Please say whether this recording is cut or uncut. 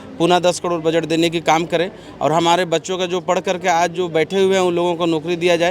uncut